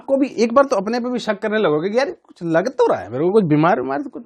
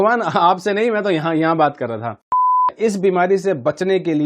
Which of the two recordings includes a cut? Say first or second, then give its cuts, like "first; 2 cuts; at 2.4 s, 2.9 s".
second; 1 cut; at 2.5 s